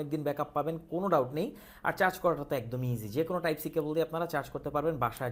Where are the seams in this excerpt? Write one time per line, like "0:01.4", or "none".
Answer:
none